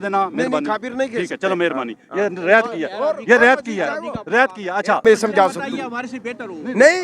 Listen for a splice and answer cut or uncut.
cut